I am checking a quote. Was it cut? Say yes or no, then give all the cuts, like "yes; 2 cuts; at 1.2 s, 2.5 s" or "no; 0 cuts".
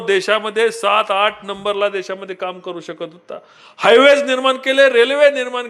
no; 0 cuts